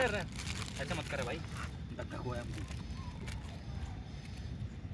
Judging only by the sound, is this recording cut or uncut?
uncut